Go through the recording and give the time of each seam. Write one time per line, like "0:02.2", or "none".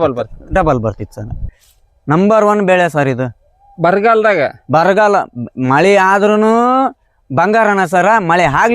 0:01.4